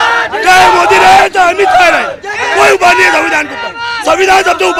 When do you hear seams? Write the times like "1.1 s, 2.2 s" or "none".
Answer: none